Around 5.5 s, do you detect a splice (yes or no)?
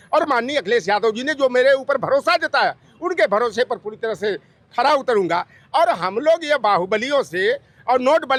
no